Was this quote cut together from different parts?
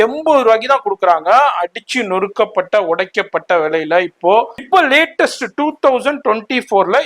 yes; 1 cut; at 4.6 s

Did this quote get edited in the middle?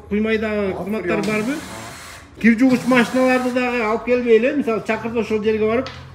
yes; 1 cut; at 2.4 s

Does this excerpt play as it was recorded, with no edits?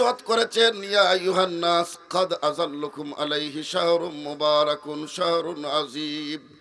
yes; 0 cuts

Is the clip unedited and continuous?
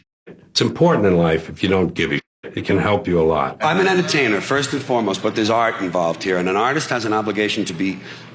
no; 1 cut; at 3.6 s

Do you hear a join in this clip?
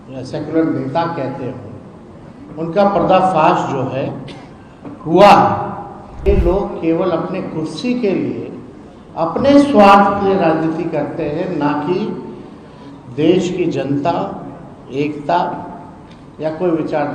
yes; 1 cut; at 6.2 s

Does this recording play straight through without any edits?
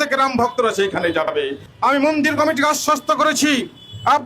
no; 1 cut; at 1.3 s

